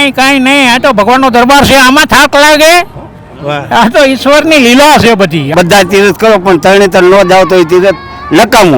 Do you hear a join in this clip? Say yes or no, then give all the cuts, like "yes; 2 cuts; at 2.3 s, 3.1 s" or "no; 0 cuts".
yes; 1 cut; at 5.5 s